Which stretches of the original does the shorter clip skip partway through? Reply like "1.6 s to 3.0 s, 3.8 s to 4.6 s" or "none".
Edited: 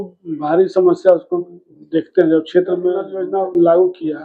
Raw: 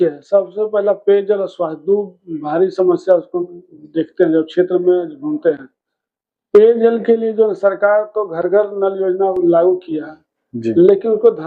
5.1 s to 9.0 s